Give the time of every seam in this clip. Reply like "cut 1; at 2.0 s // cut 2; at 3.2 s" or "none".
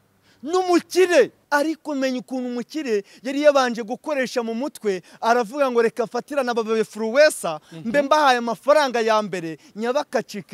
cut 1; at 1.4 s